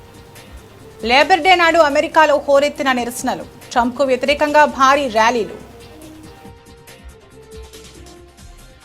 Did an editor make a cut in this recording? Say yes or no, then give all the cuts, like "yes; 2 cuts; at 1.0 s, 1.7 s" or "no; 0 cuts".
yes; 2 cuts; at 1.0 s, 5.7 s